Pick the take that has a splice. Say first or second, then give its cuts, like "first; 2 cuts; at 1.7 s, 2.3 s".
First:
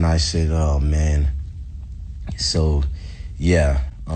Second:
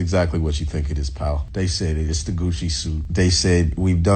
second; 2 cuts; at 1.4 s, 3.0 s